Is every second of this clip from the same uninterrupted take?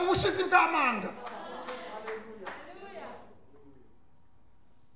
yes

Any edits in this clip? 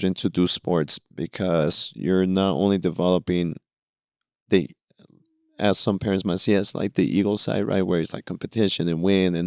no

